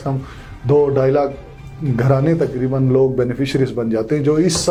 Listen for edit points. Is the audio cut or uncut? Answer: uncut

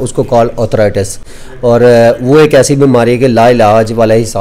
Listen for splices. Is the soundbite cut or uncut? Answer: uncut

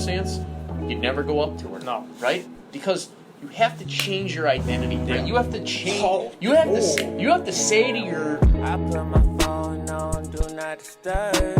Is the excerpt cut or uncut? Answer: cut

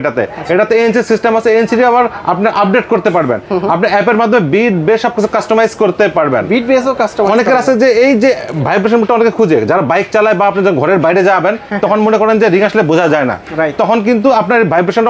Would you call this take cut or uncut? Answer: uncut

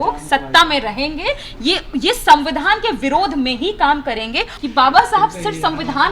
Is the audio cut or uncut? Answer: cut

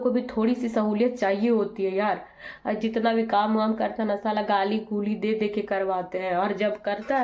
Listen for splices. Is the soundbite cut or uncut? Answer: uncut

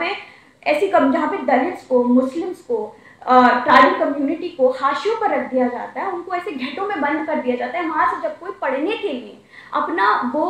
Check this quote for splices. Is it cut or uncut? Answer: uncut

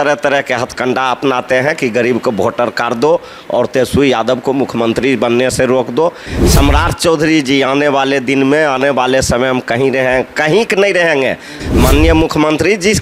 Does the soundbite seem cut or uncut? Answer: cut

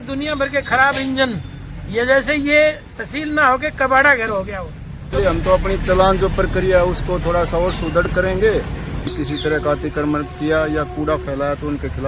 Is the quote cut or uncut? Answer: cut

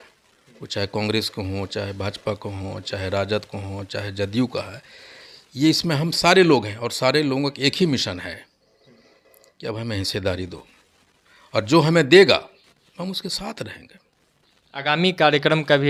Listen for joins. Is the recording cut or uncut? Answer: uncut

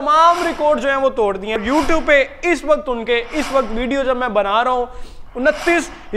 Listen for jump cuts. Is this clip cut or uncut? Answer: cut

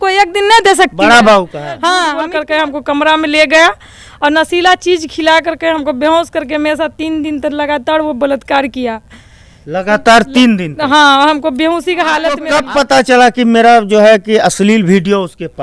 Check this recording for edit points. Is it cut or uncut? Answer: cut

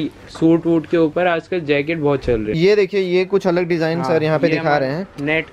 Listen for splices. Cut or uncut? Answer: cut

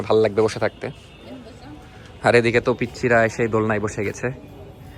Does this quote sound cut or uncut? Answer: uncut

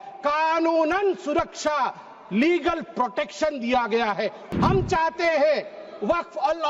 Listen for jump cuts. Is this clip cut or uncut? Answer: cut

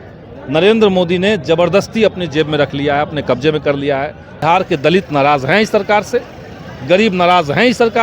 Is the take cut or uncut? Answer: cut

